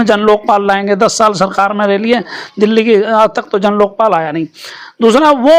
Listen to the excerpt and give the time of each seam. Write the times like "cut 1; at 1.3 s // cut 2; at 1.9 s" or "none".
none